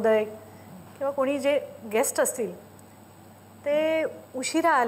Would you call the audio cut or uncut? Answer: uncut